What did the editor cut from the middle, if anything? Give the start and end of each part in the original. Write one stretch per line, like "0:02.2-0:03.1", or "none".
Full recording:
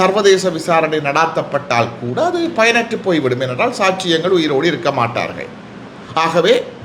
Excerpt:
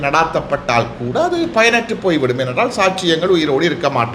none